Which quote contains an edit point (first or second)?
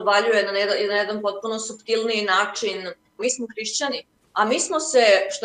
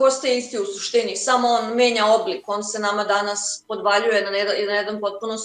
first